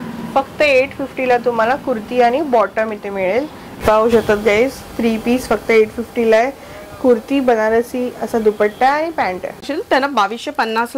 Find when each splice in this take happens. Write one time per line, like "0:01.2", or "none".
0:03.8
0:09.6